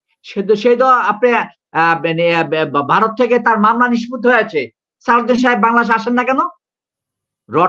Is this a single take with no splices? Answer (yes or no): yes